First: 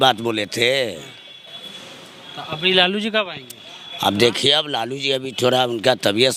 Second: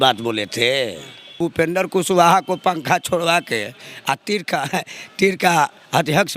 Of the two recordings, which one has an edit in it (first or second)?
second